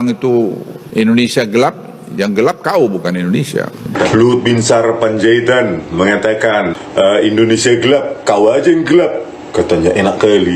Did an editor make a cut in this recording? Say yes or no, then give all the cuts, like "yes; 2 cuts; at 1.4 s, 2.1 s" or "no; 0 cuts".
yes; 1 cut; at 4.0 s